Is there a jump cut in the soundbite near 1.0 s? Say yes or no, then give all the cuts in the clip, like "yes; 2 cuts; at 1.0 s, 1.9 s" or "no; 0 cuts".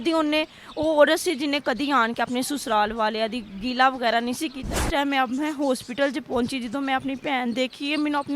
no; 1 cut; at 4.8 s